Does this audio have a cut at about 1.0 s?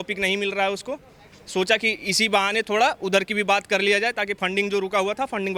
no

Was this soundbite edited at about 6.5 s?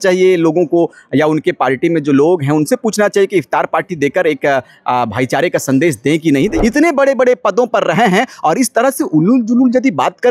yes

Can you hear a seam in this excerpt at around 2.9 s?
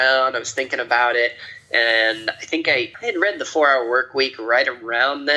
yes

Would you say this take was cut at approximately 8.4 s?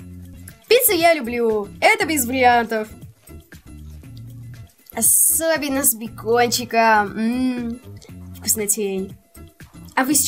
no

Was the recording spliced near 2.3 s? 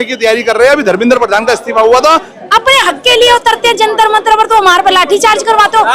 yes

